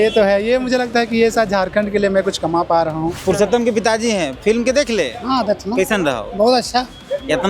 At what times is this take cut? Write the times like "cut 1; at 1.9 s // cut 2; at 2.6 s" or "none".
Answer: cut 1; at 3.2 s